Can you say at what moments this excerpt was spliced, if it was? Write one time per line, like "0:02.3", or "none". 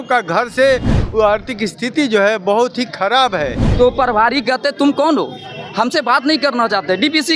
0:00.9
0:03.6